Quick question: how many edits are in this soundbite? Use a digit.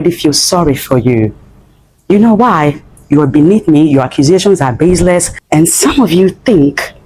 1